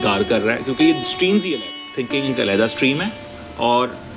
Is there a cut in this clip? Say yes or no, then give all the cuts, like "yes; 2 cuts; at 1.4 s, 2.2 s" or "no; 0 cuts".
yes; 1 cut; at 1.8 s